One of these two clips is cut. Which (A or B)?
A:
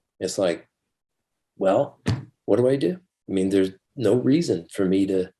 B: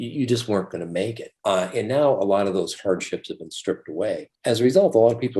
B